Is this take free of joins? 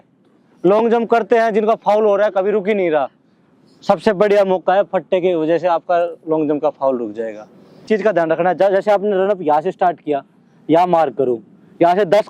no; 1 cut; at 7.8 s

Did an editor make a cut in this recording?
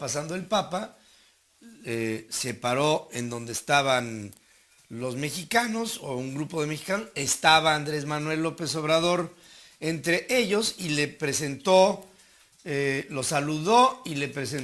no; 0 cuts

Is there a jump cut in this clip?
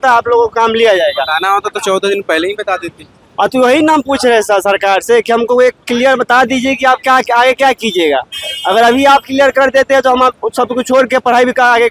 no; 0 cuts

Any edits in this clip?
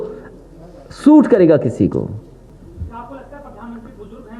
yes; 1 cut; at 2.5 s

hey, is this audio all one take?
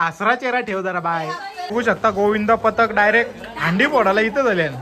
no; 1 cut; at 1.6 s

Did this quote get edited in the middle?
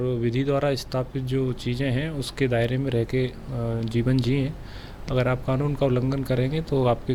no; 0 cuts

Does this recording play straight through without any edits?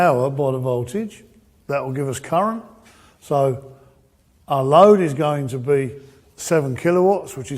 no; 1 cut; at 2.1 s

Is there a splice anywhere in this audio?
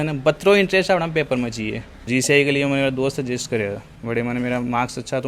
yes; 1 cut; at 2.1 s

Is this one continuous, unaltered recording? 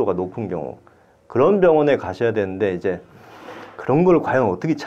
yes; 0 cuts

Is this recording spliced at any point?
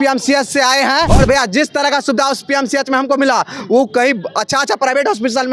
yes; 1 cut; at 1.1 s

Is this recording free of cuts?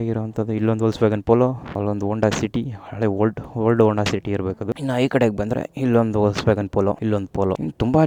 yes; 0 cuts

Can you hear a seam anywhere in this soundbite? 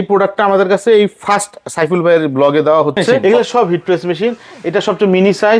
yes; 1 cut; at 3.2 s

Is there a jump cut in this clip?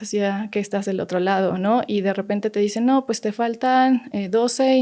no; 0 cuts

